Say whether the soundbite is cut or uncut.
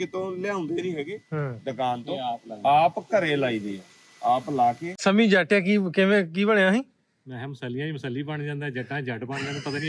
cut